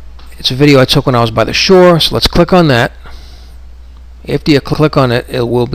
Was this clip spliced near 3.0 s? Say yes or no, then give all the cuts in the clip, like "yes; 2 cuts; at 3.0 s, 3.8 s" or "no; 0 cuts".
yes; 1 cut; at 3.0 s